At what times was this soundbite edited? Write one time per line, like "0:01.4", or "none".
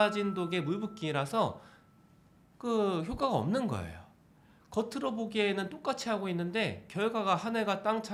none